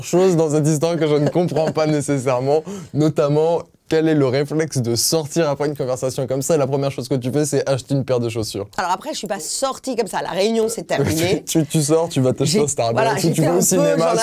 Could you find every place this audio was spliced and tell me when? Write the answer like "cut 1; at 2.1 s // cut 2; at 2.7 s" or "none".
none